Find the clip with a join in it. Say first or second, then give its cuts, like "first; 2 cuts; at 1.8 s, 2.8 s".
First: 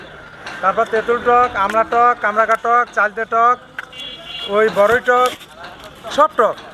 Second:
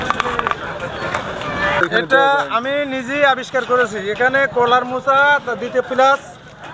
second; 1 cut; at 1.8 s